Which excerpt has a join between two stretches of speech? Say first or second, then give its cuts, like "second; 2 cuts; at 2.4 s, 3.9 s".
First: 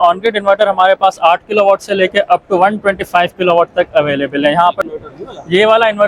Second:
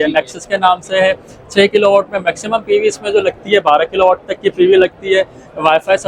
first; 1 cut; at 4.9 s